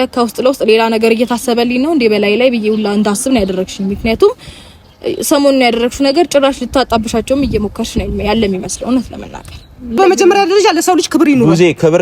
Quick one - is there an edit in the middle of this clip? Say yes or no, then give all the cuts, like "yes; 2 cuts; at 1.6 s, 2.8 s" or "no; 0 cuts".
yes; 1 cut; at 10.0 s